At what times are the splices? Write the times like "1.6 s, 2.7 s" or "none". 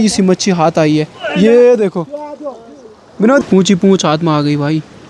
3.4 s